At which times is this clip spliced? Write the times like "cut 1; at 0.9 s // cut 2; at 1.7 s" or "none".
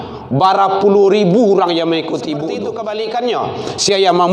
cut 1; at 2.5 s